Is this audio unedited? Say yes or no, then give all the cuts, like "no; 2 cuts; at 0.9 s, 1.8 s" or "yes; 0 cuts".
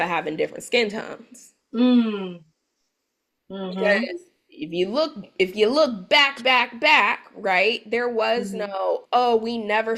yes; 0 cuts